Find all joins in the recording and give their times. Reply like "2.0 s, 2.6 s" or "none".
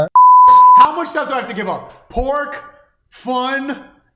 0.9 s